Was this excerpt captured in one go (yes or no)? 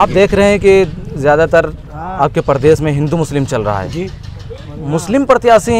yes